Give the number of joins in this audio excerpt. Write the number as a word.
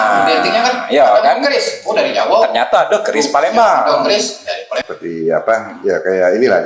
one